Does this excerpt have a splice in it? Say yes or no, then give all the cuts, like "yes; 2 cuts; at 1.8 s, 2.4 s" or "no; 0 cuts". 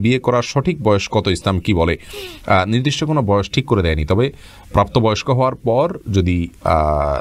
no; 0 cuts